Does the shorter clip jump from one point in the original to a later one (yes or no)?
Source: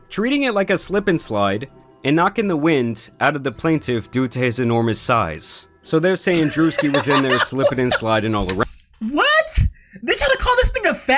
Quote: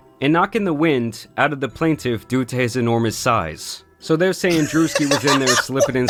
no